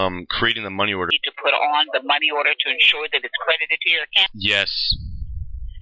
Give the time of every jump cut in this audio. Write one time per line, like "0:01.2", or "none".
0:01.2
0:04.3